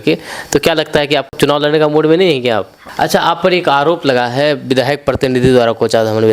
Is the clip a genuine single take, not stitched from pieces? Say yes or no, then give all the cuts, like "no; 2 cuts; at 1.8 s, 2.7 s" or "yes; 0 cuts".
no; 2 cuts; at 1.3 s, 2.8 s